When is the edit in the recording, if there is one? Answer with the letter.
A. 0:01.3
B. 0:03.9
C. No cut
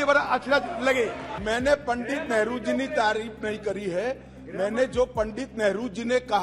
A